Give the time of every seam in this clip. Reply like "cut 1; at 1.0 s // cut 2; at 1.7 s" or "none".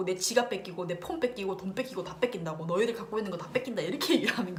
none